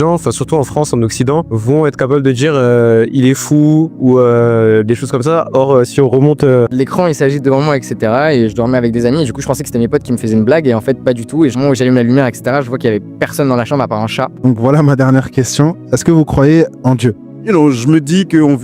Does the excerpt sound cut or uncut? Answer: cut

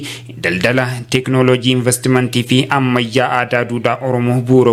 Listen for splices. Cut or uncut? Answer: uncut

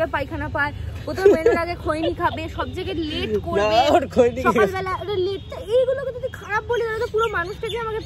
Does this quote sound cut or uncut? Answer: uncut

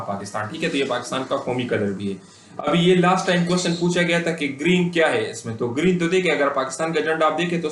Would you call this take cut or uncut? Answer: uncut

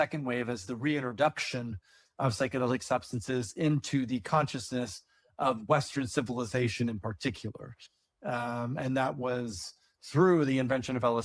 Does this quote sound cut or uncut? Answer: uncut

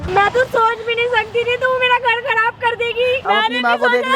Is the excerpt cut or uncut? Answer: cut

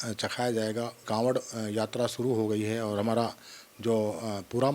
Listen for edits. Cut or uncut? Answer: cut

